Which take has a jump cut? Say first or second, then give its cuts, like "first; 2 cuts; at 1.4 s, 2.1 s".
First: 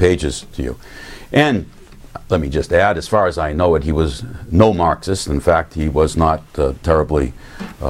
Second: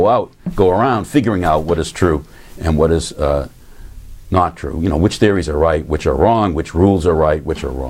first; 1 cut; at 3.7 s